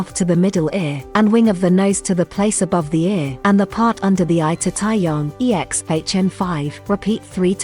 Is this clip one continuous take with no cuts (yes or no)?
no